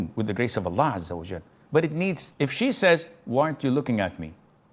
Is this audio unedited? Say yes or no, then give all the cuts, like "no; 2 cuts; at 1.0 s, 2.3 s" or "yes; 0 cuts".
no; 1 cut; at 2.3 s